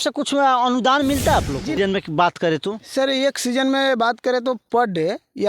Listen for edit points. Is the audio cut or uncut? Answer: cut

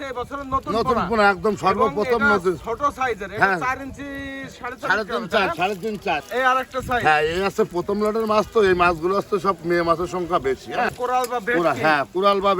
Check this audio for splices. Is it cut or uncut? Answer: cut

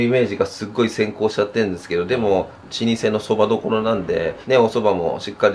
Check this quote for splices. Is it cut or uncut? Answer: cut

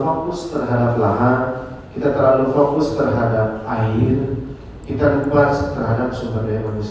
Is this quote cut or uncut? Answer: uncut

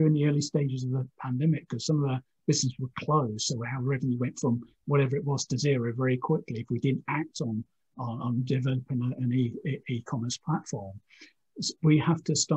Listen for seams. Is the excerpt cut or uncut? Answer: uncut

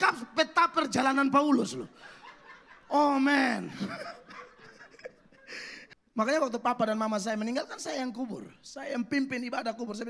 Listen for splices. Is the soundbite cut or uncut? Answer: cut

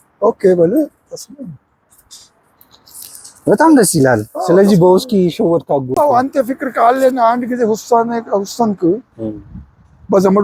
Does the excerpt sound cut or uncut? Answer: uncut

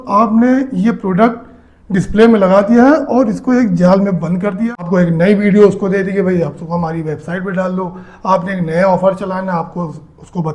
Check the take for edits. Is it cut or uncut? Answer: cut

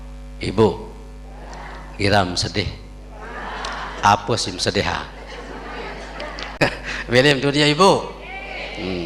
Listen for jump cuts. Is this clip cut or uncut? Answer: cut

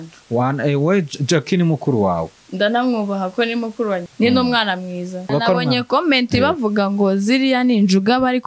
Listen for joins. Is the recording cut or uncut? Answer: cut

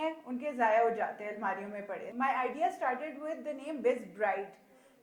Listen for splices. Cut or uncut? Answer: cut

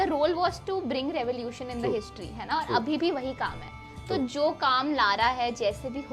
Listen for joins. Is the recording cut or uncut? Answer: uncut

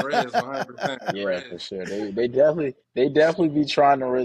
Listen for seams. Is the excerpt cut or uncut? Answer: cut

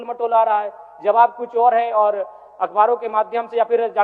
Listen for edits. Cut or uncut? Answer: uncut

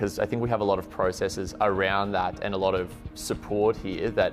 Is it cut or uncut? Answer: uncut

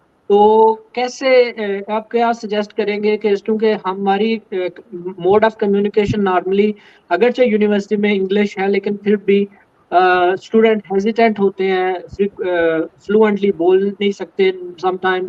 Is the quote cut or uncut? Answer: uncut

